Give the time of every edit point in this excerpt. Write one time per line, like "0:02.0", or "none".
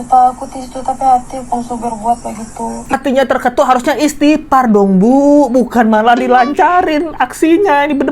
0:02.9